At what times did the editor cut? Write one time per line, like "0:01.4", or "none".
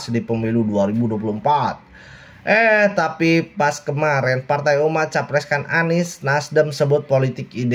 none